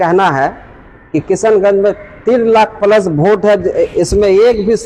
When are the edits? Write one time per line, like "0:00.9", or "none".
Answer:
none